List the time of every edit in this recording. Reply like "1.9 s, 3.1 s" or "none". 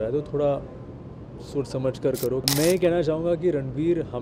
2.5 s